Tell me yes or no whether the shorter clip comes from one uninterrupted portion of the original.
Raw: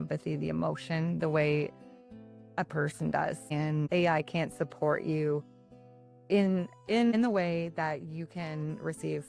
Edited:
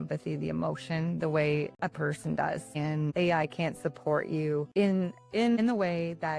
no